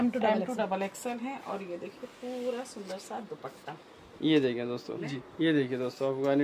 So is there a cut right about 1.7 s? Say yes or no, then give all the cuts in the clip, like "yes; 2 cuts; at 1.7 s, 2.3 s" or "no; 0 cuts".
no; 1 cut; at 5.2 s